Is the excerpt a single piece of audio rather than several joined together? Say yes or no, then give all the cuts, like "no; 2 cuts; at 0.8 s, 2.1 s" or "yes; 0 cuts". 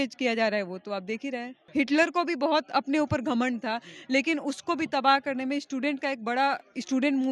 no; 1 cut; at 1.6 s